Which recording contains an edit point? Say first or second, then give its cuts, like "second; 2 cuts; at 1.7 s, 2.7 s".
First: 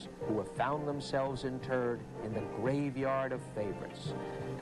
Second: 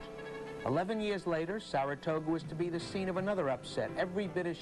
second; 1 cut; at 1.5 s